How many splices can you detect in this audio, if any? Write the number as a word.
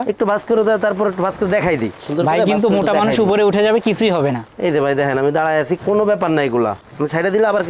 two